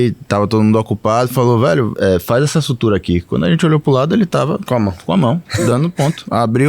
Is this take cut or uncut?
cut